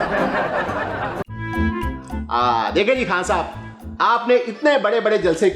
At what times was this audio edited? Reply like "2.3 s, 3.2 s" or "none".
1.2 s